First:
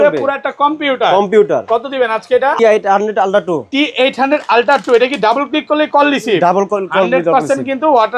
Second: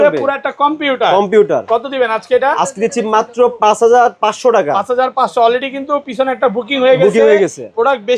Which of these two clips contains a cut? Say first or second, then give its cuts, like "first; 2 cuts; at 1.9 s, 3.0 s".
first; 1 cut; at 2.6 s